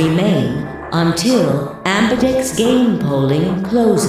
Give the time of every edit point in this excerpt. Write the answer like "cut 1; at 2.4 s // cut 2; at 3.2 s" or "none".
none